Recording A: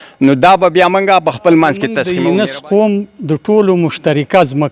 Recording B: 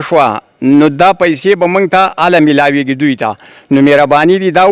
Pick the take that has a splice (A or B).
A